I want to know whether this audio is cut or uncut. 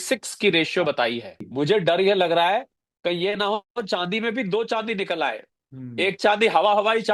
cut